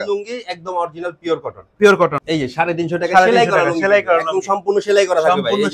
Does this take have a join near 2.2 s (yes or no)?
yes